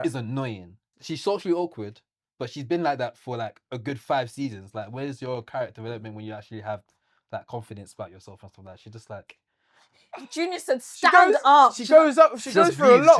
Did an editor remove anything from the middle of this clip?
yes; 1 cut; at 0.9 s

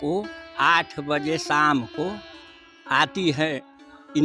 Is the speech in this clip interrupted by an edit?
no; 0 cuts

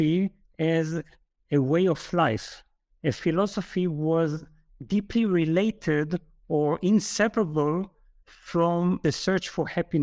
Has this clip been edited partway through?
yes; 2 cuts; at 3.2 s, 9.0 s

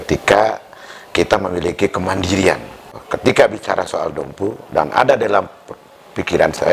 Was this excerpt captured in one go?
no; 1 cut; at 2.9 s

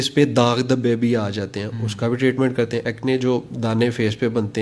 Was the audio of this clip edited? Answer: yes; 1 cut; at 2.8 s

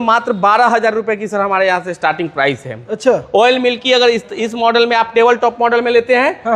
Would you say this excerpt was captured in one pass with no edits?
yes; 0 cuts

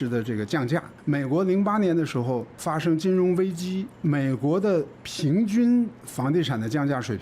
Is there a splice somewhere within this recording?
yes; 3 cuts; at 0.9 s, 2.5 s, 3.9 s

